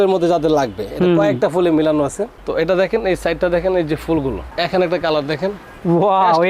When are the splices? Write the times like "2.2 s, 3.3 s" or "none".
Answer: 4.4 s